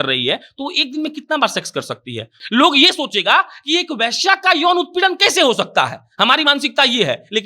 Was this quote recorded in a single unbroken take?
no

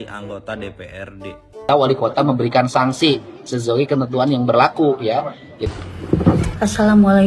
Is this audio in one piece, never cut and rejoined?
no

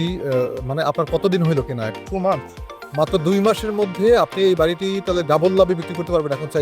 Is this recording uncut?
no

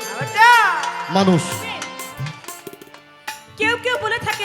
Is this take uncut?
no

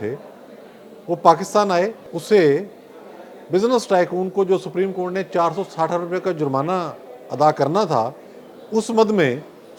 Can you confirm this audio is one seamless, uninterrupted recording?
no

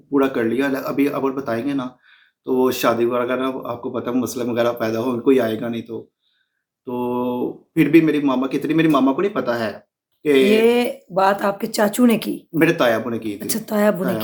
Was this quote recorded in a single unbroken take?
yes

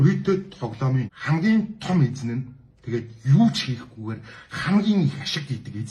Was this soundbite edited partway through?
yes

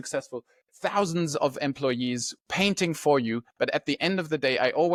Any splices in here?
no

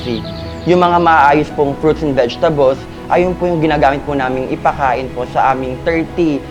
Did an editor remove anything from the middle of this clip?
no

